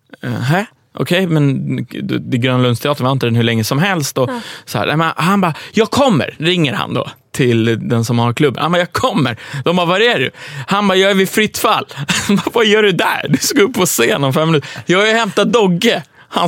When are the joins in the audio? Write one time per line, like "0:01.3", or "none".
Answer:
none